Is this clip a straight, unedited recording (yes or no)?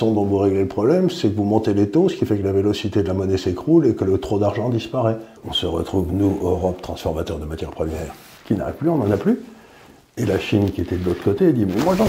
no